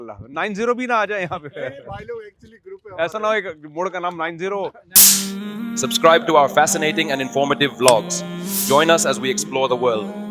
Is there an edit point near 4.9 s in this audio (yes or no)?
yes